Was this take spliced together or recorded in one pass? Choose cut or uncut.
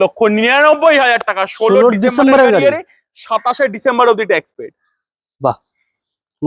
uncut